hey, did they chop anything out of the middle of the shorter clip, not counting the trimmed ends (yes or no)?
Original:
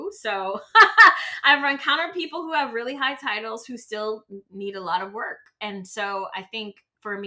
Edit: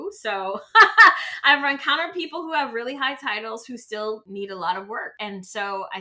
yes